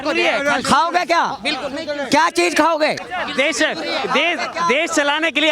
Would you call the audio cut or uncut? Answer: uncut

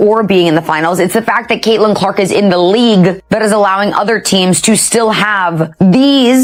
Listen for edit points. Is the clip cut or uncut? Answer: uncut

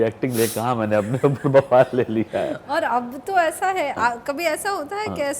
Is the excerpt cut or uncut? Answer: uncut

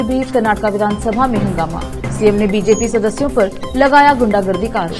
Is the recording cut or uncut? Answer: uncut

